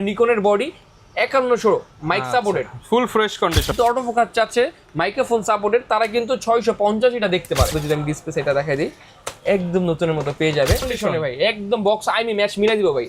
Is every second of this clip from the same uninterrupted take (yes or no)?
no